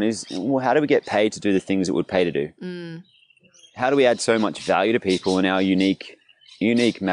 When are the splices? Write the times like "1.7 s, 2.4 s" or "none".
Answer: none

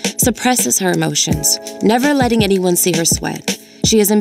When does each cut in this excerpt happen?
none

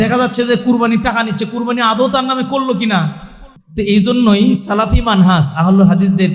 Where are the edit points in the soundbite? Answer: none

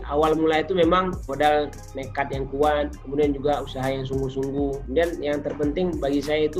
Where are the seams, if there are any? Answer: 1.2 s, 4.8 s

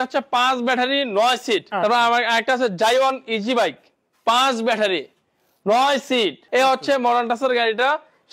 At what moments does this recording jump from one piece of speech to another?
1.7 s, 6.4 s

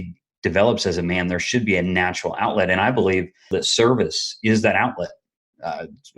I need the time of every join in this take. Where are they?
3.5 s

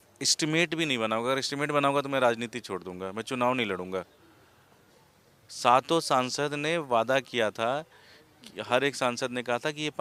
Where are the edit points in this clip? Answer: none

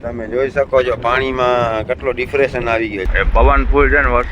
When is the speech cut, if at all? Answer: 3.1 s

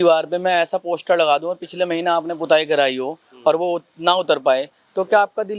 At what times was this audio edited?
none

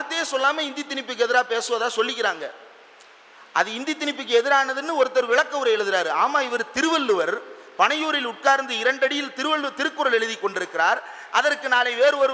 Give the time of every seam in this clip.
none

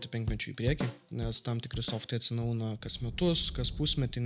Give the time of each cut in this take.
none

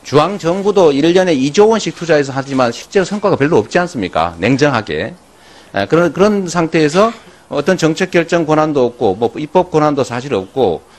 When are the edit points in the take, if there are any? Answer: 8.6 s

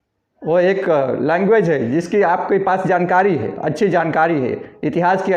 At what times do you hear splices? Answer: none

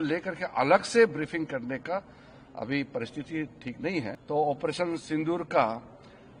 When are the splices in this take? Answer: 4.2 s

